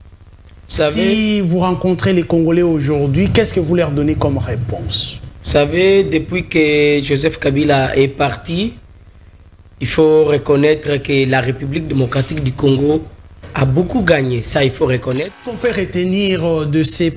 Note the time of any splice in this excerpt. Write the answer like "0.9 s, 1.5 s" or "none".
15.8 s